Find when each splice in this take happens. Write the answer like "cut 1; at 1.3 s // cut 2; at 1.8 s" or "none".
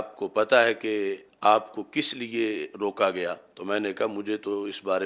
cut 1; at 1.3 s // cut 2; at 3.5 s